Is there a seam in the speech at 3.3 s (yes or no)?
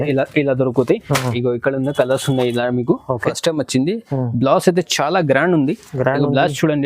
yes